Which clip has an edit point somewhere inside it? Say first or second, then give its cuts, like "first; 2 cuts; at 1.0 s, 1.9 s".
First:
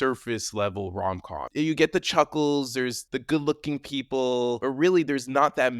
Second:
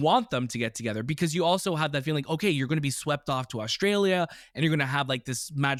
first; 3 cuts; at 1.4 s, 3.1 s, 4.6 s